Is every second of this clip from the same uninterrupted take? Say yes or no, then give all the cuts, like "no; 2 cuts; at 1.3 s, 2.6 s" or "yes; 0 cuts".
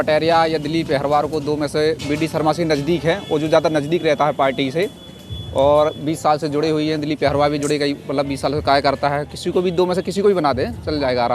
yes; 0 cuts